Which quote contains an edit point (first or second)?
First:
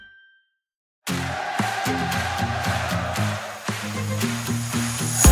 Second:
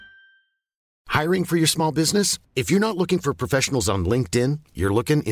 first